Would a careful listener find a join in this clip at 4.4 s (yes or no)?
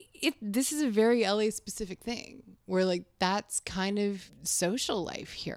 yes